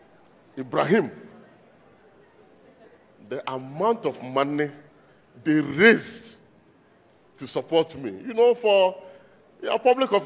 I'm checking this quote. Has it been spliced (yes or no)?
no